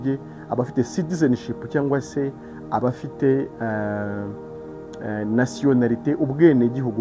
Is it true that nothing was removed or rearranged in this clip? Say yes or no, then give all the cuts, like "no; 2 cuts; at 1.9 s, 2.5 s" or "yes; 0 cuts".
yes; 0 cuts